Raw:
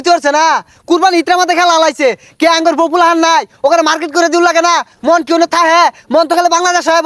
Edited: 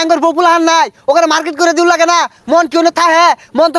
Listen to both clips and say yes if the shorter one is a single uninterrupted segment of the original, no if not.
yes